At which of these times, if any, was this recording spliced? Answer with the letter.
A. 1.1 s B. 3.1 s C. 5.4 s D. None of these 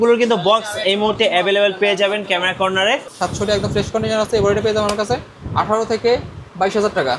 B